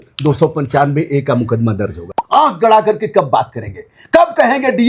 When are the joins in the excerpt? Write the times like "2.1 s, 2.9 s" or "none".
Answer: 2.1 s

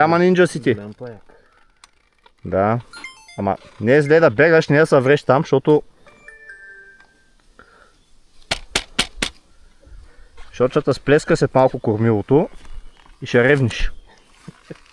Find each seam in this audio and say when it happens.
none

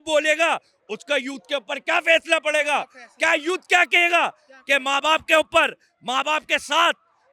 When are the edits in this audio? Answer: none

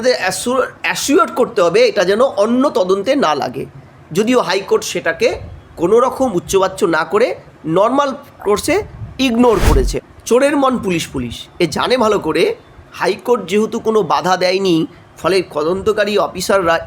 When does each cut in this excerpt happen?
10.0 s

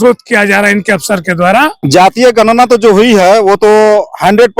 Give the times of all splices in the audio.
1.8 s

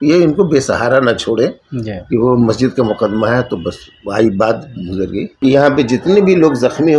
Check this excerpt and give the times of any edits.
5.2 s

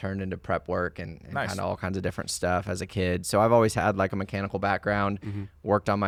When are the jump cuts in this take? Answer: none

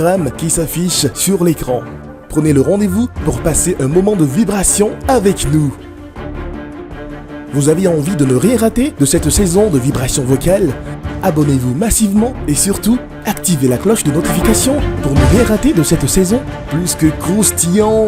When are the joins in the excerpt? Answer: none

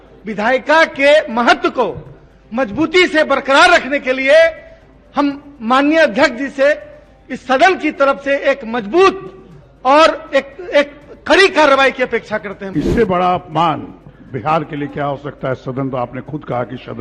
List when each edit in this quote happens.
12.6 s

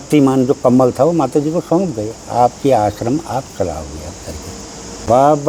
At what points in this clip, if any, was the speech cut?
none

